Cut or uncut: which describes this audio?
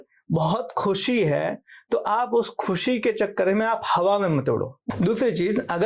cut